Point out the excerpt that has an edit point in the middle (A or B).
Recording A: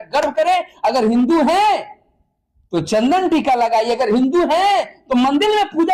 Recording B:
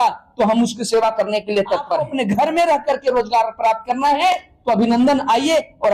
B